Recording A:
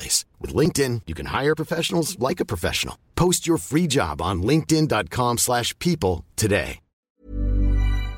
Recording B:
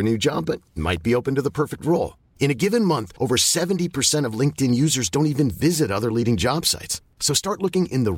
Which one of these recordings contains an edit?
A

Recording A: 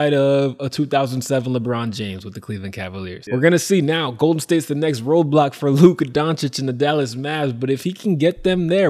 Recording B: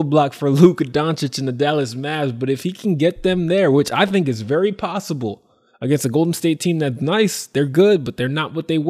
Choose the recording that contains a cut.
A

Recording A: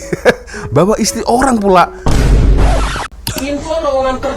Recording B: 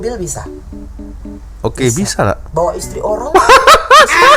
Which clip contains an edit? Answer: A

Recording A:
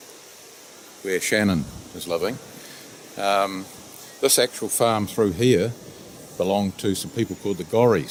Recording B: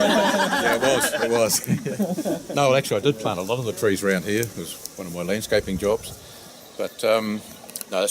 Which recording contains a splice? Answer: B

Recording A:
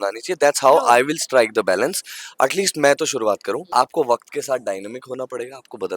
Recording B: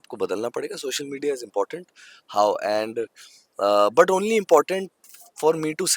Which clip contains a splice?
A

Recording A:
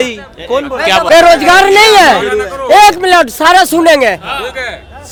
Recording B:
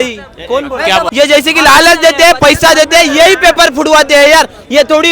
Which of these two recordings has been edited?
B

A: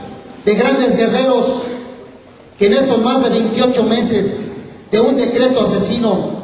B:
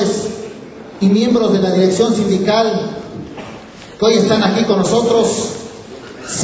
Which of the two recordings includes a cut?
B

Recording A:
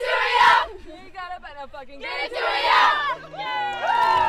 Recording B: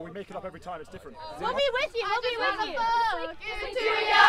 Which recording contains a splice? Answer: B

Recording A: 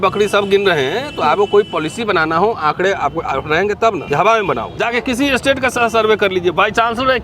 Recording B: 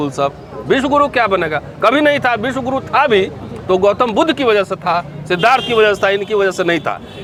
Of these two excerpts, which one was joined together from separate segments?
A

